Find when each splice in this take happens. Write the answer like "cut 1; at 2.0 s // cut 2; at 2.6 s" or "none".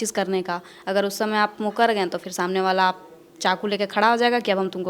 none